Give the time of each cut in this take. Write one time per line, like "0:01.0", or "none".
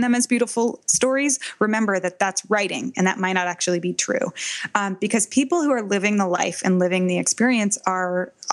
none